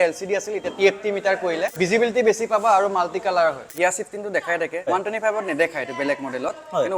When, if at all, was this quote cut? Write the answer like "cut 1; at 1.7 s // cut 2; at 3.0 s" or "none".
cut 1; at 1.7 s // cut 2; at 3.7 s // cut 3; at 4.9 s